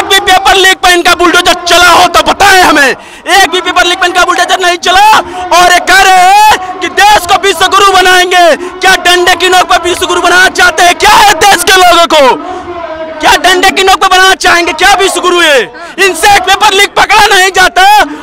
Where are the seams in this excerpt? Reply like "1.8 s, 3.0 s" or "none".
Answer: none

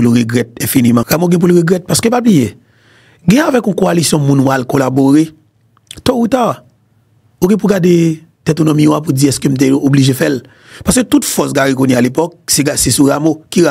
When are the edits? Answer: 1.1 s

